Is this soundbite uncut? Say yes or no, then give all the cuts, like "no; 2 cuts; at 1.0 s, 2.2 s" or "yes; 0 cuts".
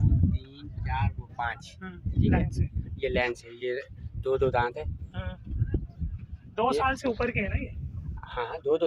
yes; 0 cuts